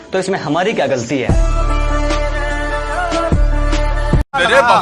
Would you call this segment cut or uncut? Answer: uncut